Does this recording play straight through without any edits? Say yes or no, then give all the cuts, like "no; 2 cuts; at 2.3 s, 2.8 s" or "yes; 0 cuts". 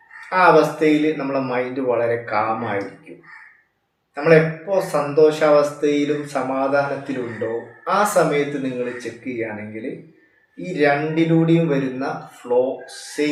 yes; 0 cuts